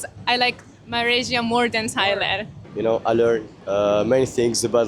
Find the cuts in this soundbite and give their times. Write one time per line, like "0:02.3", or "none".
0:02.7